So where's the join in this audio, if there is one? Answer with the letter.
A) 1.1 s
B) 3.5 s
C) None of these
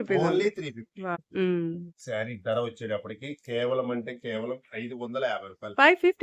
A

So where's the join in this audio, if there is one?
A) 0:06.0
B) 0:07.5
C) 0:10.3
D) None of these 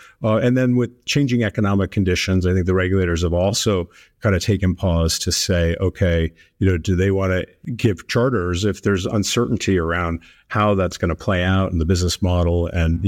B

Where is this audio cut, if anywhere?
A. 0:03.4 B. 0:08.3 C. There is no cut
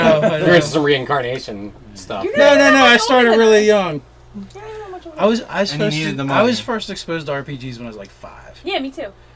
A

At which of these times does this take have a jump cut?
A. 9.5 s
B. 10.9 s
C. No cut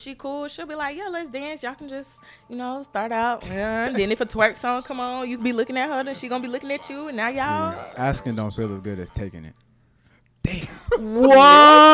C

